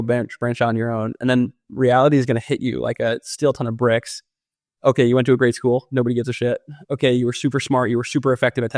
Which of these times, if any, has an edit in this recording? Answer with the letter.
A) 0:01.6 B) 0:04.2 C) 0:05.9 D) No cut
D